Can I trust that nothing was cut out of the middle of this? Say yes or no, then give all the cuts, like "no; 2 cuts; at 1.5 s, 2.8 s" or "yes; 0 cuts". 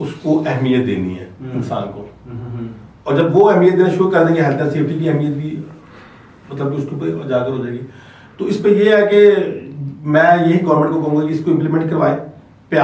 yes; 0 cuts